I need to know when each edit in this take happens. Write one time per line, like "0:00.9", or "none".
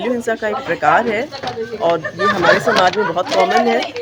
none